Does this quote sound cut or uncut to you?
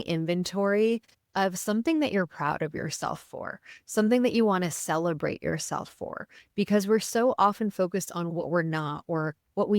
cut